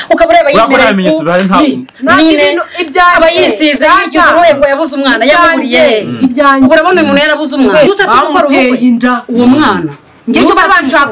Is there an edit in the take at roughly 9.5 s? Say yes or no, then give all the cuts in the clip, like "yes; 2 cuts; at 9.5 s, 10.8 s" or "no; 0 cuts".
no; 1 cut; at 7.9 s